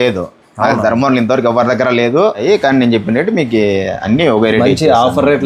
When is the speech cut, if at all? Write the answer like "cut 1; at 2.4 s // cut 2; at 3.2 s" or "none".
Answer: cut 1; at 2.4 s